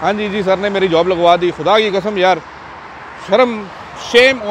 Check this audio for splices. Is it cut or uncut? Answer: uncut